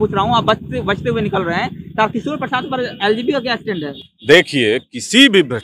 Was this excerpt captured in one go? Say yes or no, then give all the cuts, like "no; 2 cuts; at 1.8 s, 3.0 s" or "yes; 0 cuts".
yes; 0 cuts